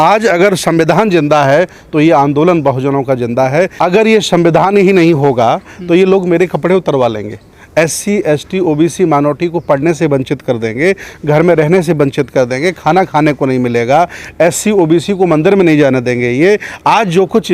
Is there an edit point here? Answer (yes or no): yes